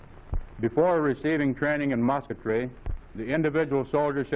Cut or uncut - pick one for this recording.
uncut